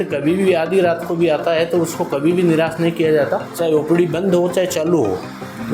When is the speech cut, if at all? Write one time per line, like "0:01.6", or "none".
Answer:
none